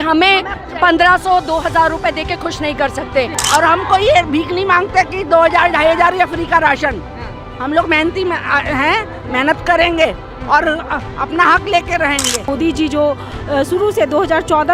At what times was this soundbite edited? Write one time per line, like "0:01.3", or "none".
0:03.4
0:12.5

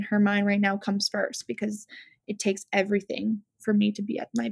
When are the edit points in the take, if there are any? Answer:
none

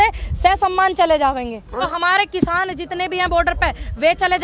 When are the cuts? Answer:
0:01.8

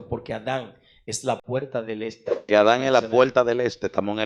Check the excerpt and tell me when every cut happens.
0:02.4

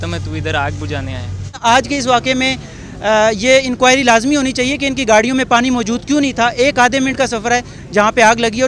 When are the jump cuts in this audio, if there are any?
0:01.6

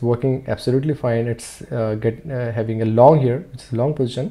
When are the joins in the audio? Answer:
none

